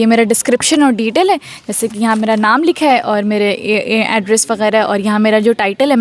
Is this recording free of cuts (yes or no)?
yes